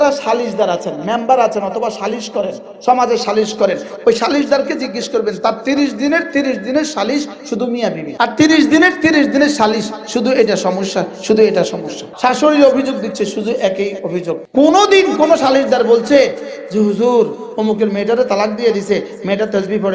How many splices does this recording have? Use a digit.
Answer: 3